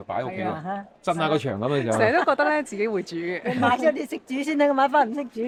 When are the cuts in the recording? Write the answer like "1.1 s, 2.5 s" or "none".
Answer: none

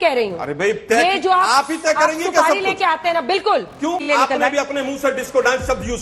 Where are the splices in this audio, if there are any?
4.0 s

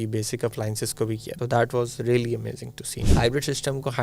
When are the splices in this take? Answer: 1.3 s, 3.0 s

